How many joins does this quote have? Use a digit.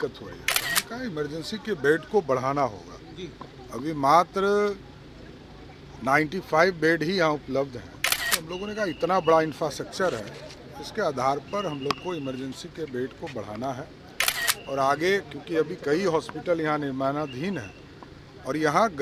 0